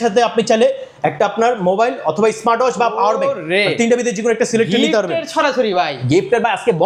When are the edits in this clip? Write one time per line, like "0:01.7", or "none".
none